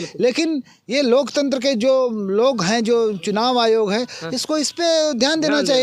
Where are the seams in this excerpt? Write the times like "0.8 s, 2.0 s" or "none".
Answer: none